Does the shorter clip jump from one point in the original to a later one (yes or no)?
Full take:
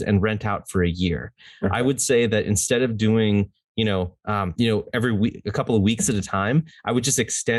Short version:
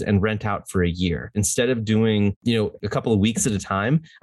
yes